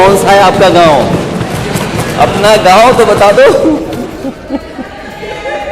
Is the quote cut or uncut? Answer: cut